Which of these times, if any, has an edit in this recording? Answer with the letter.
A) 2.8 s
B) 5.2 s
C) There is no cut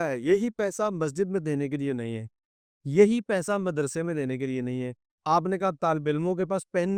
C